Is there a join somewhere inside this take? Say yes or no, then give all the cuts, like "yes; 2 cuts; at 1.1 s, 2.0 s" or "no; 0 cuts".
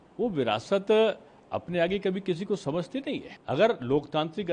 yes; 1 cut; at 3.3 s